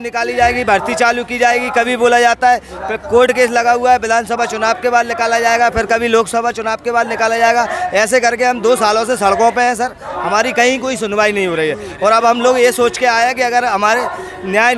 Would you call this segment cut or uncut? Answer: uncut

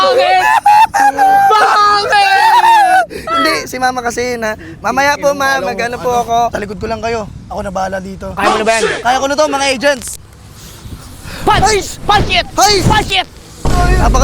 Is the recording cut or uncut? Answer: cut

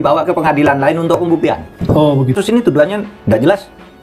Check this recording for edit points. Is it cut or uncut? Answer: cut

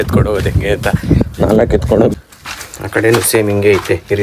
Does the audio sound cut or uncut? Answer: cut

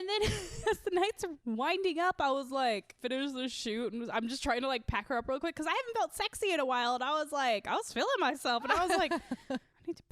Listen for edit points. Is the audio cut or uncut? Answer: cut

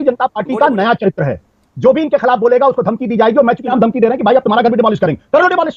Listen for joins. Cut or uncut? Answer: uncut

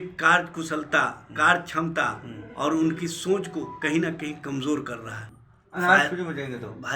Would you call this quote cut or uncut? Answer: cut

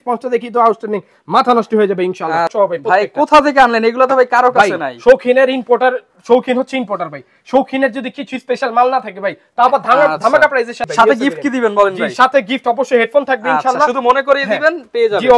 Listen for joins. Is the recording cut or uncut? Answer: cut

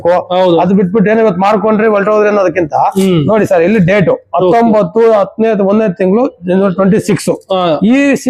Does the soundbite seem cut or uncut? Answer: uncut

